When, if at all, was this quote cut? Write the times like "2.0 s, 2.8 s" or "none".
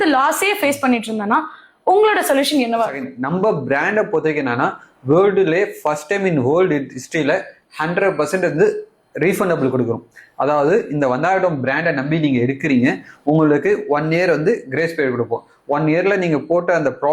3.0 s